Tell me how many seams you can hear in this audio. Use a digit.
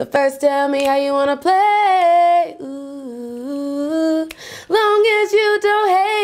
0